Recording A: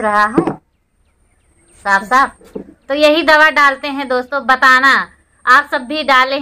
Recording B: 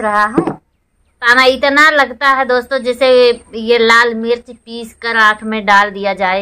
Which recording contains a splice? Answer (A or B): B